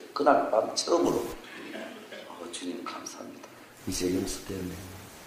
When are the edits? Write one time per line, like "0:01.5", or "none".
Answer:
0:01.5

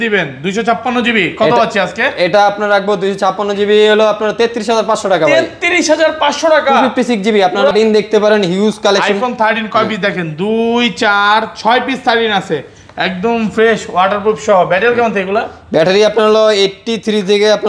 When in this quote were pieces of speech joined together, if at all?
0:07.7

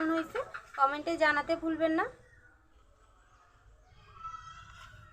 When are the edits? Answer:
0:02.6
0:04.2

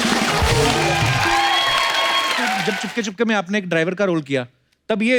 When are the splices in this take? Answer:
0:02.6

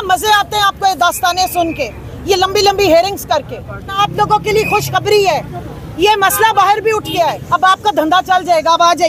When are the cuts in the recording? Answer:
0:04.0
0:07.4

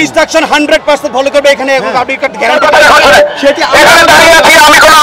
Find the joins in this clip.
0:02.6

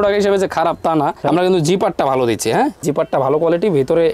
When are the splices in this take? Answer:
none

